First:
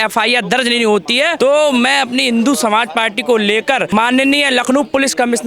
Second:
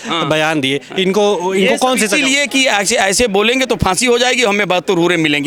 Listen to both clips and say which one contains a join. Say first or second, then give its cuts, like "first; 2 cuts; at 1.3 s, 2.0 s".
first; 2 cuts; at 1.3 s, 3.9 s